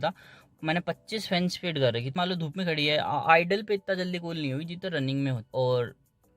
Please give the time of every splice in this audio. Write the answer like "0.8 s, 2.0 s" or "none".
2.1 s, 5.4 s